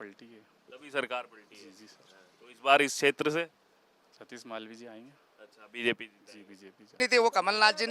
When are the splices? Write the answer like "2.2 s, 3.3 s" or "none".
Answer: 7.0 s